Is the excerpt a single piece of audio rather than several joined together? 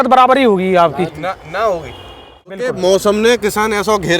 no; 1 cut; at 2.6 s

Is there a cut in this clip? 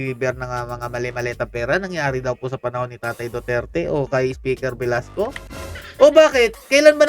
no; 0 cuts

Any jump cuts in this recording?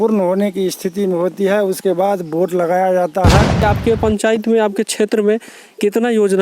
yes; 1 cut; at 3.6 s

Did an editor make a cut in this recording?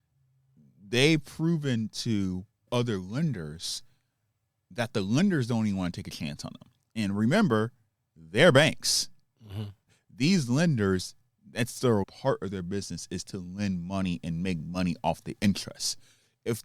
yes; 2 cuts; at 10.0 s, 12.0 s

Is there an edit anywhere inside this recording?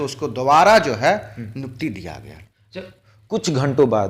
no; 0 cuts

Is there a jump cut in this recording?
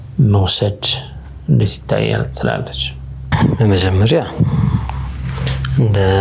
no; 0 cuts

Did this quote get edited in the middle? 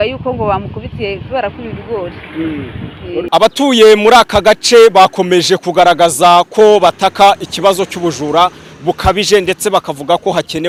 no; 0 cuts

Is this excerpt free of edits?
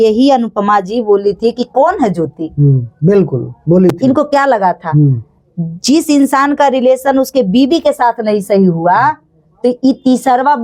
yes; 0 cuts

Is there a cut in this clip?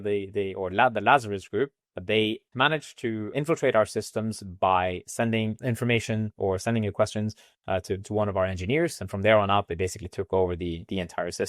yes; 3 cuts; at 2.4 s, 3.3 s, 5.6 s

